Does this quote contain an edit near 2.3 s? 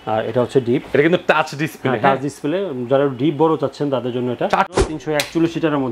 no; 1 cut; at 4.8 s

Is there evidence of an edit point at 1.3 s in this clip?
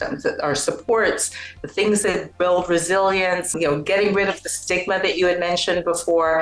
no; 1 cut; at 3.5 s

